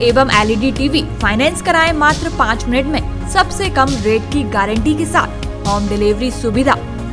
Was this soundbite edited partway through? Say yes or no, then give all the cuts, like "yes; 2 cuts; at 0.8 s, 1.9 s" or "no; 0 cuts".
no; 0 cuts